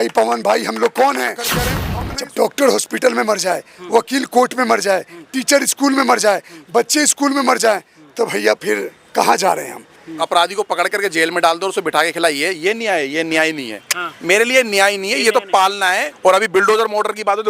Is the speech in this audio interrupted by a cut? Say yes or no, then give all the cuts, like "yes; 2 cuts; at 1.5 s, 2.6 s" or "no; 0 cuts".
yes; 3 cuts; at 1.8 s, 10.2 s, 16.1 s